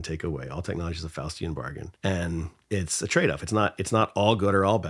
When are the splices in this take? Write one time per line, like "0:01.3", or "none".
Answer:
0:01.8

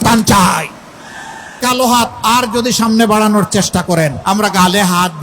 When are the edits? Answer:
0:01.6
0:04.2

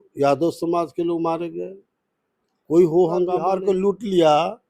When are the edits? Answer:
0:03.5

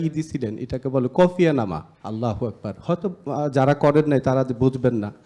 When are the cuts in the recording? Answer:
0:01.9

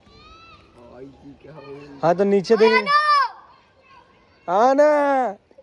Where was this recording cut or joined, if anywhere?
none

